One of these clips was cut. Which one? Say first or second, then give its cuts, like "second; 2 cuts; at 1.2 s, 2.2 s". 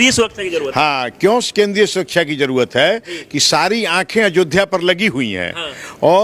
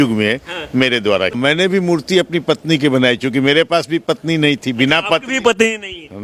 second; 1 cut; at 1.3 s